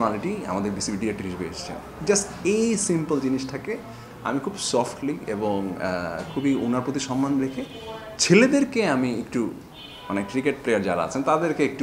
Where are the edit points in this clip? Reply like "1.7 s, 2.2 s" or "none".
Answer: none